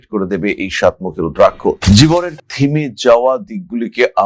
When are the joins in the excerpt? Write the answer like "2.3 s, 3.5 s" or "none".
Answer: 1.8 s